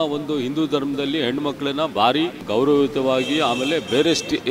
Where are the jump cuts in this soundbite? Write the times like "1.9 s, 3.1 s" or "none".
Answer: 2.4 s